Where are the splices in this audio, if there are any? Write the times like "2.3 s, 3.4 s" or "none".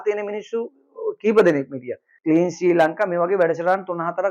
2.1 s